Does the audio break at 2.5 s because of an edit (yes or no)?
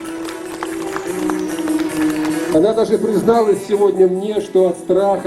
yes